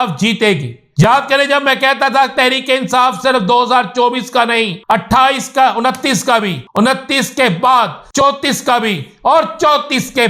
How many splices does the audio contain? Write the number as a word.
four